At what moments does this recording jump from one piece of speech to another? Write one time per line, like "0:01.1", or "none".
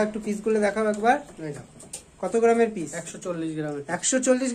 none